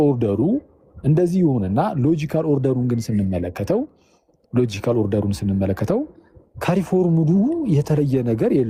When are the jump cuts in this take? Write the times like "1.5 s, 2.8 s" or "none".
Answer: none

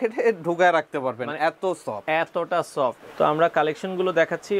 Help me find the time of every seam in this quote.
3.0 s

